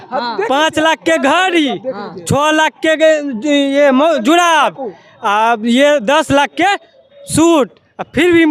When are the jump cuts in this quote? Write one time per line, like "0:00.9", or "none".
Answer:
none